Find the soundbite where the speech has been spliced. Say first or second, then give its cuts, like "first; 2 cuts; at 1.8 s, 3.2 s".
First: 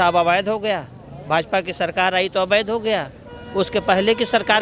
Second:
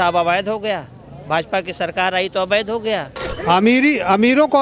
second; 1 cut; at 3.2 s